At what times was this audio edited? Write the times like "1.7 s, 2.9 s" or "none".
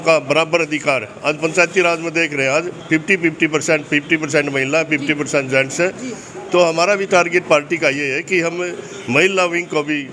none